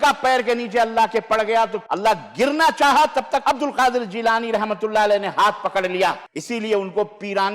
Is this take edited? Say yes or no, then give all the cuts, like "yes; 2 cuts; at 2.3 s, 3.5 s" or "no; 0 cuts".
yes; 3 cuts; at 1.8 s, 3.4 s, 6.3 s